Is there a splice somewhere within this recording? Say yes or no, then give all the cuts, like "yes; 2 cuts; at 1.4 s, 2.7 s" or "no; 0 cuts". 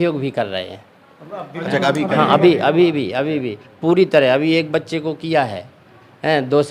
no; 0 cuts